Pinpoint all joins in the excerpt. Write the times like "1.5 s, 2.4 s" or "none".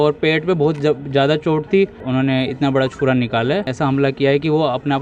2.0 s, 3.7 s